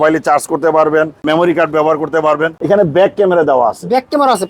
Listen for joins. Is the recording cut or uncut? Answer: cut